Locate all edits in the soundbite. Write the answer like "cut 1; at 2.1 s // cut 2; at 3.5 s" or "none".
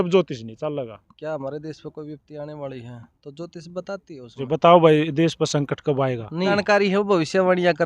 cut 1; at 1.1 s // cut 2; at 4.4 s // cut 3; at 6.5 s

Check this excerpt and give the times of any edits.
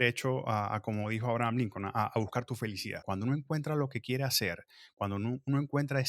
cut 1; at 3.0 s

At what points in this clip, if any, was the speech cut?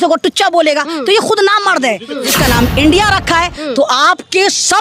cut 1; at 2.1 s

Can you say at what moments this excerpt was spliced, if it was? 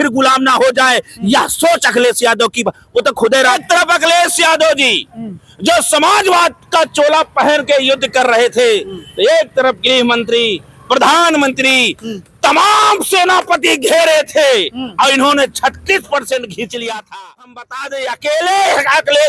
cut 1; at 3.6 s // cut 2; at 17.6 s

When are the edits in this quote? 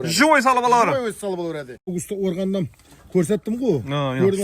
cut 1; at 1.9 s

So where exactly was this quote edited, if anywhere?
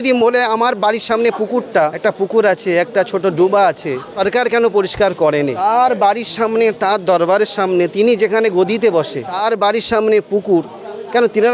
cut 1; at 2.0 s // cut 2; at 4.1 s // cut 3; at 5.6 s // cut 4; at 9.2 s

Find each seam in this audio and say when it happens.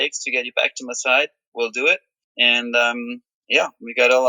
cut 1; at 2.2 s

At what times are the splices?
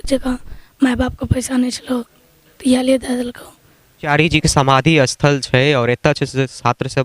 cut 1; at 4.1 s

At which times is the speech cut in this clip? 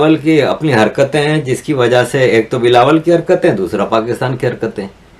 none

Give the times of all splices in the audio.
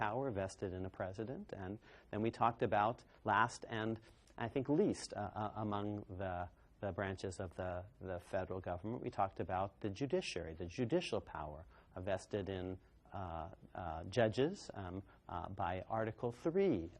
cut 1; at 2.4 s

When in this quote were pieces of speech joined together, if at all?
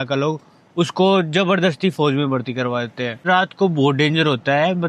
cut 1; at 3.2 s

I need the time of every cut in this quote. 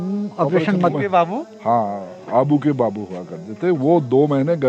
cut 1; at 1.0 s

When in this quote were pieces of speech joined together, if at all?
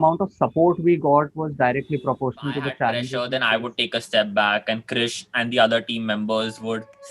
cut 1; at 3.1 s

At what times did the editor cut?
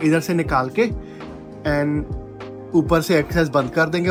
none

